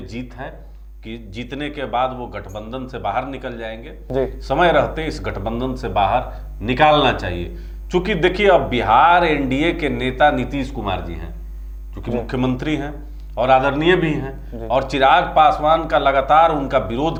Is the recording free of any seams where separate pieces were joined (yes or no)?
yes